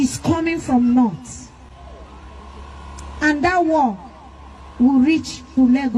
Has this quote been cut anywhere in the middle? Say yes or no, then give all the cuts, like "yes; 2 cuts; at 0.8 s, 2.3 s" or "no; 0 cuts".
no; 0 cuts